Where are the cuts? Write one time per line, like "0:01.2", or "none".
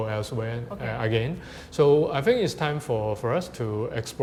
none